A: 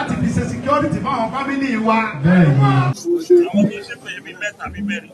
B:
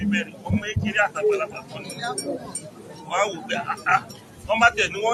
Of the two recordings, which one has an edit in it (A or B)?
A